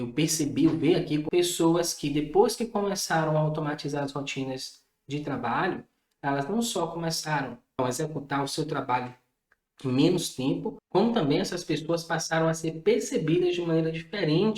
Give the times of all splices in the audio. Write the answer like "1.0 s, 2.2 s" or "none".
1.2 s, 7.6 s